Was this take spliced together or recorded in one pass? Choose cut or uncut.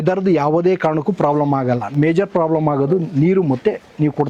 uncut